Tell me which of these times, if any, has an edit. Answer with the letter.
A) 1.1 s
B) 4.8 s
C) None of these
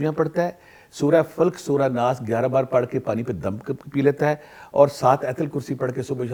C